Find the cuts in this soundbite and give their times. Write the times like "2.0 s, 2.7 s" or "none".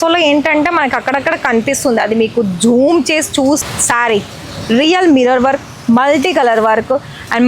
3.7 s